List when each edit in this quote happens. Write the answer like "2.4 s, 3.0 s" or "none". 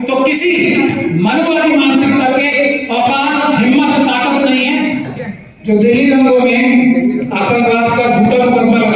5.1 s